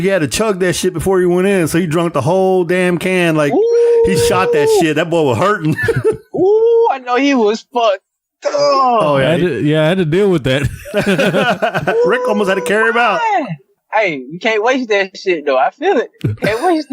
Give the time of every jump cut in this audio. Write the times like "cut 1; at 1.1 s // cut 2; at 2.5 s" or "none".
cut 1; at 13.8 s